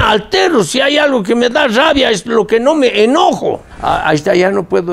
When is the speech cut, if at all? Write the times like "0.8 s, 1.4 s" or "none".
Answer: 3.7 s